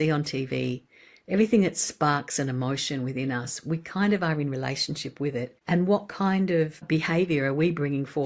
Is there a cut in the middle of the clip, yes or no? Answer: yes